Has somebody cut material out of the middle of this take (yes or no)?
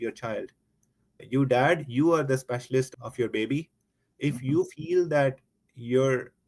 no